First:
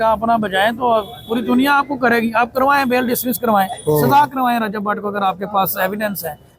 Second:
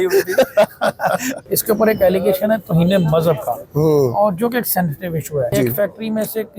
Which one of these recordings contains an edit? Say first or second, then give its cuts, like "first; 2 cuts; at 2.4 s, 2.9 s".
second; 2 cuts; at 1.3 s, 5.5 s